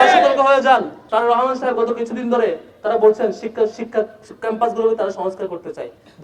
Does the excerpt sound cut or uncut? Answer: cut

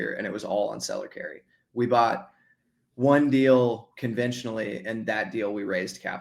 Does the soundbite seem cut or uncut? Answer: cut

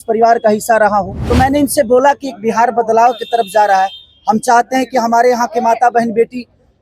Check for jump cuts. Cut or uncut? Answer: cut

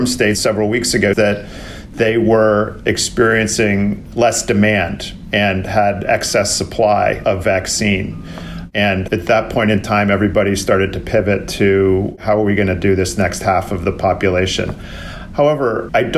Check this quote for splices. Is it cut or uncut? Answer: uncut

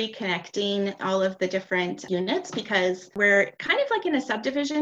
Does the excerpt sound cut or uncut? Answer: cut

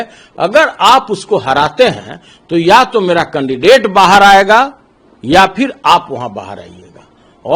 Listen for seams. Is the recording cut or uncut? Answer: uncut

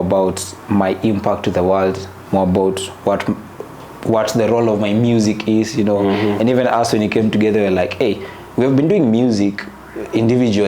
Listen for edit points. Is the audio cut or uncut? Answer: uncut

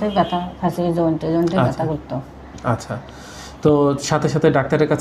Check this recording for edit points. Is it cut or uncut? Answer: uncut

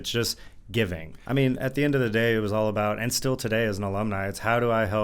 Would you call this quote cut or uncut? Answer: cut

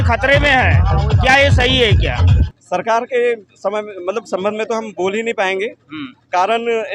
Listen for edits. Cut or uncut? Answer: cut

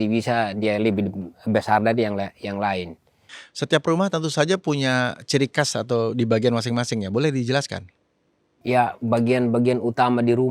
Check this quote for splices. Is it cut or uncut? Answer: uncut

